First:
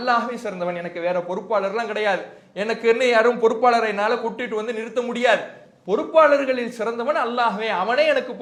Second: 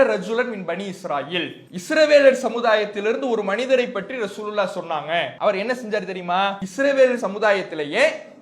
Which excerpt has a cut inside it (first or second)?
second